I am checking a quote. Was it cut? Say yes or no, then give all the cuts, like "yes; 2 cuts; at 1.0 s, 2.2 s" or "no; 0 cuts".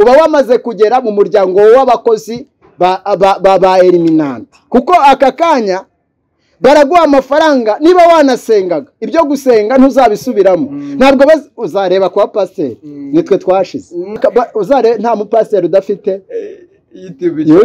yes; 1 cut; at 14.2 s